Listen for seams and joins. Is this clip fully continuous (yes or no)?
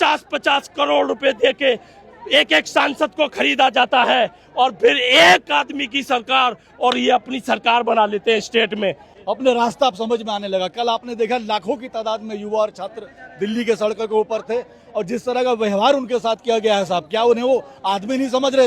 no